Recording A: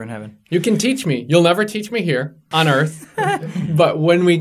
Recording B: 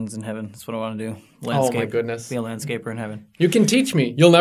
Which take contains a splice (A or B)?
A